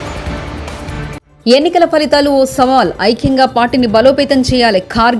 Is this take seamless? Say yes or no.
no